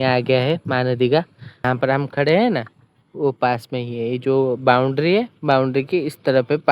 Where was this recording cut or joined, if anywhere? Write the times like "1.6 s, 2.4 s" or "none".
1.6 s